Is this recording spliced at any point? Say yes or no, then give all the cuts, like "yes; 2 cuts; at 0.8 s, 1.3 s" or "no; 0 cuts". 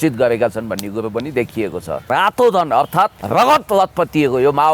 yes; 2 cuts; at 2.1 s, 3.2 s